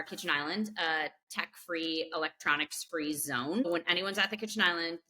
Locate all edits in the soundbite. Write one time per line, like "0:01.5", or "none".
0:03.6